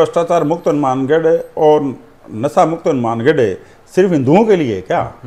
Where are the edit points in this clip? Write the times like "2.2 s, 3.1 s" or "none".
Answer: none